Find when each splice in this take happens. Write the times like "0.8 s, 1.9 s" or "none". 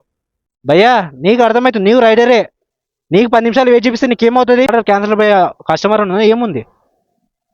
4.7 s